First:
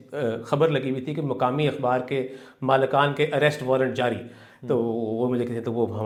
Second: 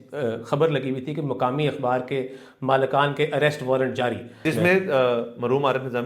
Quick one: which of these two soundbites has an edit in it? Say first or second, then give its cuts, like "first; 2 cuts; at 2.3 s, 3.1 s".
second; 1 cut; at 4.3 s